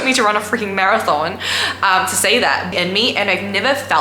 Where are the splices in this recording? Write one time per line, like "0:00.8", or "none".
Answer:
0:02.7